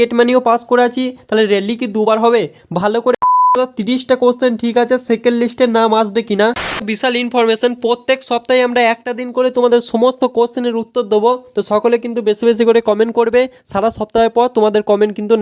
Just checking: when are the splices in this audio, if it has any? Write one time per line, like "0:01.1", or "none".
0:03.4
0:06.8